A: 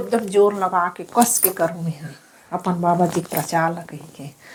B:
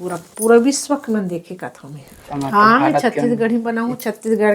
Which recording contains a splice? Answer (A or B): B